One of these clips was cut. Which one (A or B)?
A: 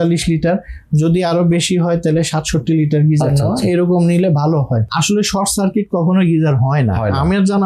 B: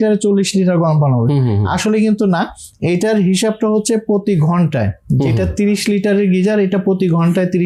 A